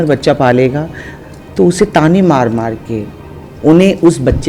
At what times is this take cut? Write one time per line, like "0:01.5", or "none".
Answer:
0:03.5